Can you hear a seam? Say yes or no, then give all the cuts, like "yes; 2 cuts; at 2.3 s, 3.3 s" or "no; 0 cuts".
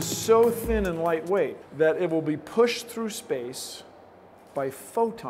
yes; 1 cut; at 1.6 s